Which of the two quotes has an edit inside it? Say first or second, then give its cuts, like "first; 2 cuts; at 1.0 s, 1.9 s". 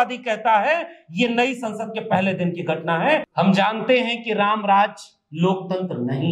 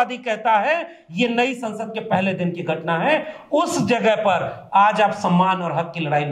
first; 1 cut; at 3.3 s